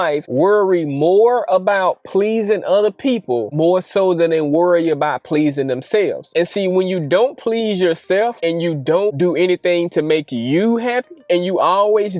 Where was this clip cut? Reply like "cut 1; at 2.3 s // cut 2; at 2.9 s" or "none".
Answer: none